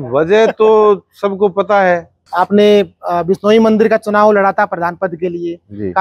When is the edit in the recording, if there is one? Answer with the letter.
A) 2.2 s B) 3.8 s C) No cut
A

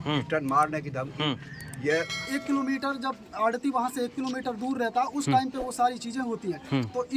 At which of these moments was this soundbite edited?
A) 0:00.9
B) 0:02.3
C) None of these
B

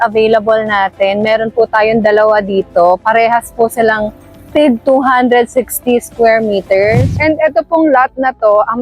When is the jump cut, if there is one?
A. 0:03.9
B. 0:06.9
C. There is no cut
B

